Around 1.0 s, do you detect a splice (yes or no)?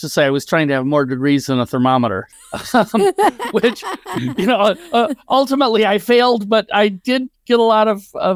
no